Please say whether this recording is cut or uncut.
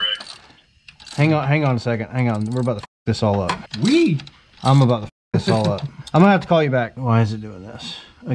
cut